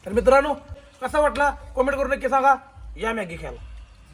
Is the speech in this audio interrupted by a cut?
yes; 1 cut; at 0.9 s

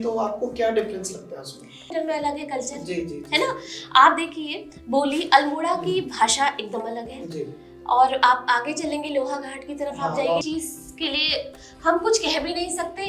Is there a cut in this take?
yes; 2 cuts; at 1.9 s, 10.4 s

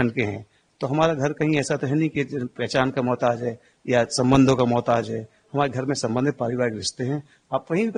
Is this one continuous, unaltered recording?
yes; 0 cuts

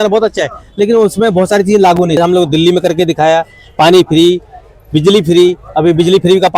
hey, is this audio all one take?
no; 1 cut; at 2.2 s

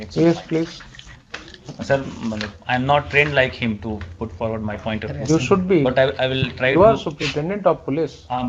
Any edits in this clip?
no; 0 cuts

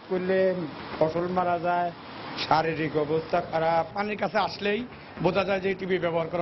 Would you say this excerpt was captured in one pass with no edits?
no; 1 cut; at 3.9 s

